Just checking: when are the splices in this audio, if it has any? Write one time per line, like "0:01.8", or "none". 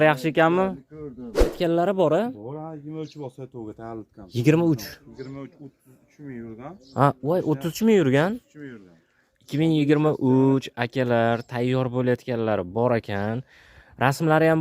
0:01.5

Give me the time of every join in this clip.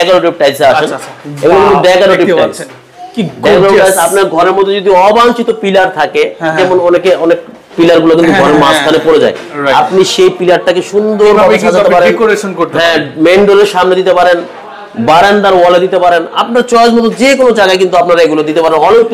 none

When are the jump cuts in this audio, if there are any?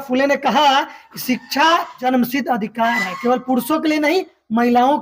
0:01.9

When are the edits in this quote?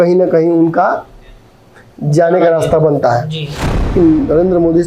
0:03.8

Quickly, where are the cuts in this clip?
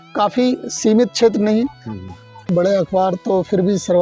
0:02.4

